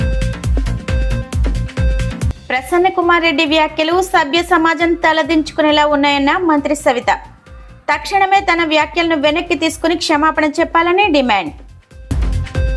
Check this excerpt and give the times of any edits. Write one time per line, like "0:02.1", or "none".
0:00.9